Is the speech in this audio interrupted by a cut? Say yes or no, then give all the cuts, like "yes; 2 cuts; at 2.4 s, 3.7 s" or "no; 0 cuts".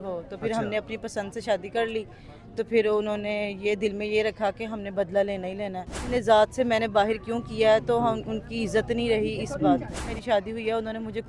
yes; 2 cuts; at 6.1 s, 10.1 s